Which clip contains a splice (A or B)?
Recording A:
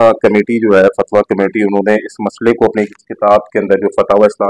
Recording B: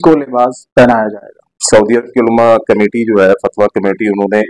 B